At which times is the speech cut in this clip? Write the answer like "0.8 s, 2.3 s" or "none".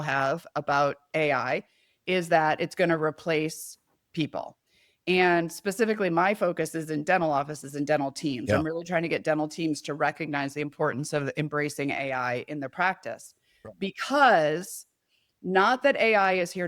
1.1 s